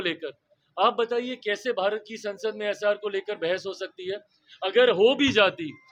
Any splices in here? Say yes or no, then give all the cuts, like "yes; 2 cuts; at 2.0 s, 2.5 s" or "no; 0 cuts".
no; 0 cuts